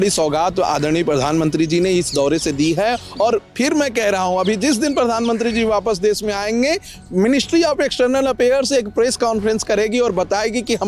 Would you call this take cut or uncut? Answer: uncut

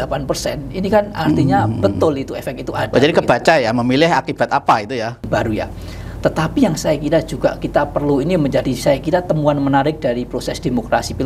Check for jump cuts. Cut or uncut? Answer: cut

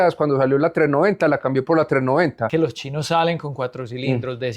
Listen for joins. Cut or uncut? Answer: cut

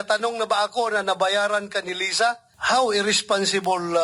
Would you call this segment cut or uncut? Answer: cut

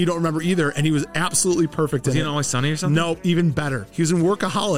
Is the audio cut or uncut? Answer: uncut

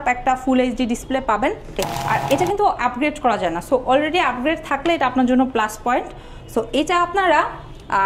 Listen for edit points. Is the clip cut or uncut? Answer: cut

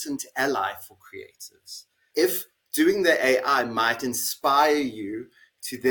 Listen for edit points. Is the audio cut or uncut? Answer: cut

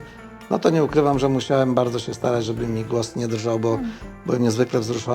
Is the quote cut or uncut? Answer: uncut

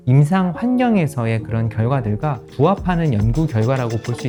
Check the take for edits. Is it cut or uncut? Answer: uncut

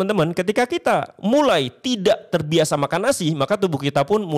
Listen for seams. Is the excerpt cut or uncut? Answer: uncut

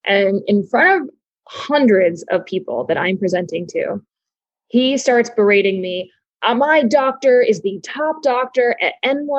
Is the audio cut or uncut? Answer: uncut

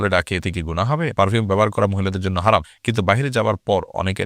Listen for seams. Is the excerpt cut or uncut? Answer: cut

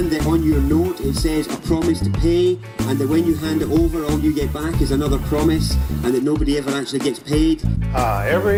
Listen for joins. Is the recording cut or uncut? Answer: uncut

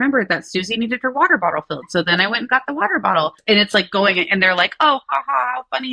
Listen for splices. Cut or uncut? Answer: cut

